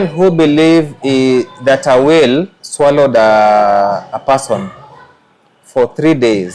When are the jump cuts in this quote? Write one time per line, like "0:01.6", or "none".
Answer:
none